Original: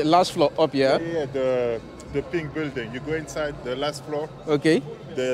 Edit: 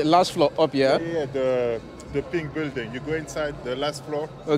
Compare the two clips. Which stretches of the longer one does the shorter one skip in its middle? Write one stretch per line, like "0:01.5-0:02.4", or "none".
none